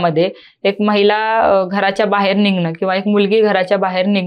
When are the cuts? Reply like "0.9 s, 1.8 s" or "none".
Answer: none